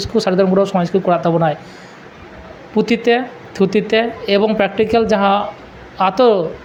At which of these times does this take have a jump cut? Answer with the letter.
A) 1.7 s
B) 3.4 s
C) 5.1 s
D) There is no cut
D